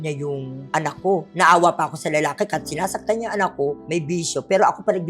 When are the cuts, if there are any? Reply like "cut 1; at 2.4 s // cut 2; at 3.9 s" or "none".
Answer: cut 1; at 1.3 s // cut 2; at 3.8 s

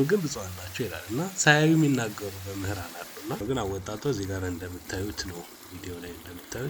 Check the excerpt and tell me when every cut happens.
cut 1; at 3.4 s

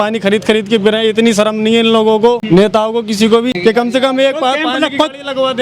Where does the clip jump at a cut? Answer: cut 1; at 2.4 s // cut 2; at 3.6 s

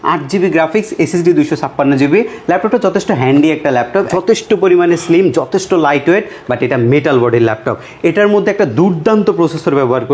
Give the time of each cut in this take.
cut 1; at 4.1 s

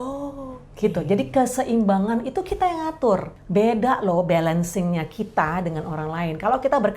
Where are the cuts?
cut 1; at 3.4 s

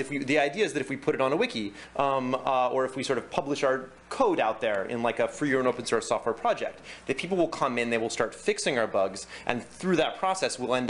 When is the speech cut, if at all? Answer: none

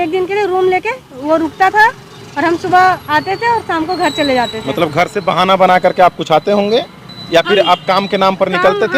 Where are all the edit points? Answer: none

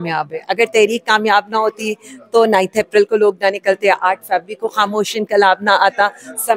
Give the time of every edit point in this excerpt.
none

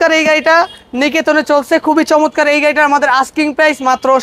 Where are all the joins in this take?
none

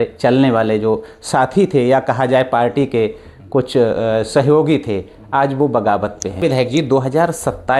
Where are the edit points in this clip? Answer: cut 1; at 6.4 s

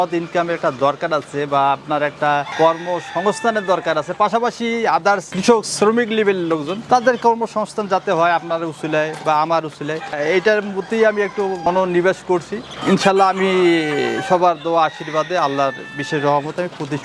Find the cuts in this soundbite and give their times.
none

